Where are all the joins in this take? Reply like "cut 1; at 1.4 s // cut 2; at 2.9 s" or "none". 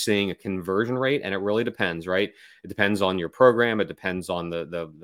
none